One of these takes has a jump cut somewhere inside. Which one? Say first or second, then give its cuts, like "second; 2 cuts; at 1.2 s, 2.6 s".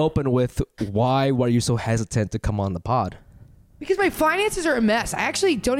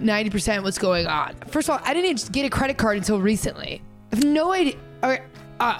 second; 1 cut; at 1.5 s